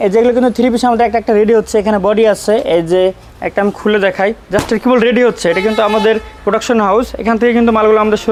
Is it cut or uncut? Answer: uncut